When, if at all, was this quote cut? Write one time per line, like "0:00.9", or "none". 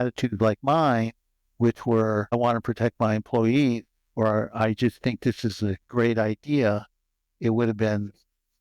0:02.3